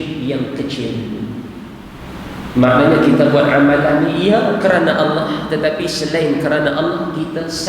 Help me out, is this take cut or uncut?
cut